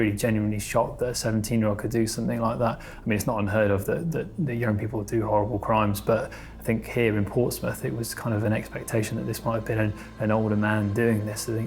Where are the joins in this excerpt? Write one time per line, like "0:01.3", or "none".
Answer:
none